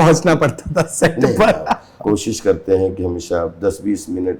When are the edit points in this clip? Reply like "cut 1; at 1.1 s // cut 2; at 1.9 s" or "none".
cut 1; at 1.9 s